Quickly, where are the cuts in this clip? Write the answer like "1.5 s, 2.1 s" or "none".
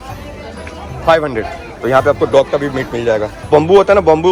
none